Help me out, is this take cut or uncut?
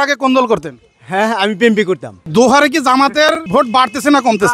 cut